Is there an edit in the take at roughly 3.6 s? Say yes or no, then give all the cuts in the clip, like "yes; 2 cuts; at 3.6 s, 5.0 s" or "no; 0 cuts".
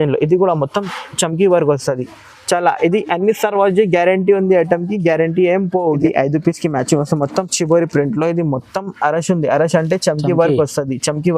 no; 1 cut; at 5.9 s